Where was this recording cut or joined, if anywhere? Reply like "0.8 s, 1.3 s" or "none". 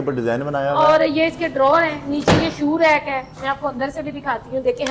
none

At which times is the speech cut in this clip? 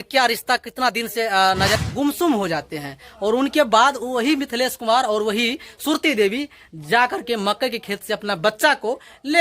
1.8 s

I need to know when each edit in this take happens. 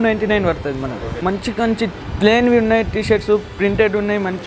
1.1 s

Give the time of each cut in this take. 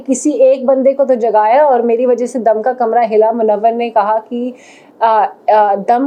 none

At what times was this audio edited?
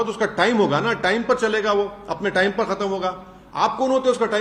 none

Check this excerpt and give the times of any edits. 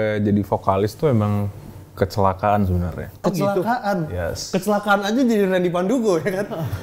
none

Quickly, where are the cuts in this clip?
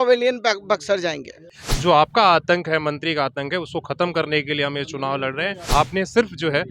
1.6 s, 5.6 s

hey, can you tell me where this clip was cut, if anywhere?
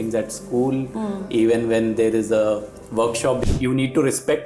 3.4 s

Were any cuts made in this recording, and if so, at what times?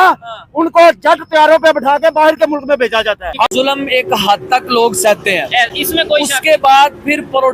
3.5 s

